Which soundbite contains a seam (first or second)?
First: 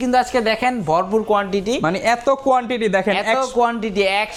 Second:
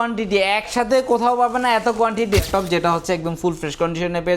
second